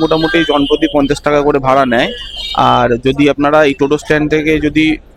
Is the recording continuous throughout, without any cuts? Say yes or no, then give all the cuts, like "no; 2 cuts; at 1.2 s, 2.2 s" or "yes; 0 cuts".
yes; 0 cuts